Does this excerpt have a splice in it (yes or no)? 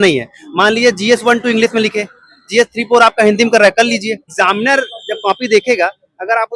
yes